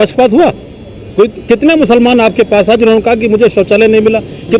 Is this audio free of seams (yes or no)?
yes